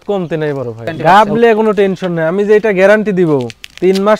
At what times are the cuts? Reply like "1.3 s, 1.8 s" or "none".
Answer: 0.9 s